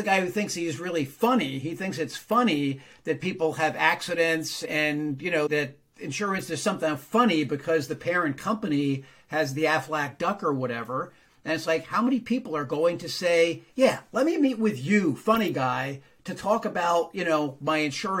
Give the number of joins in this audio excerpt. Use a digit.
1